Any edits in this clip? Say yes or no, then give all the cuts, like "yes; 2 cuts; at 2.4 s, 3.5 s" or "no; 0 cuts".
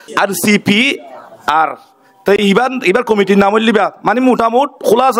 no; 0 cuts